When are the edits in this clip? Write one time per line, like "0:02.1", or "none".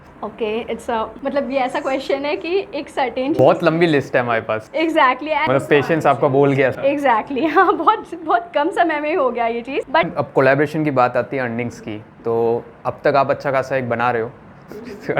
0:05.5
0:10.1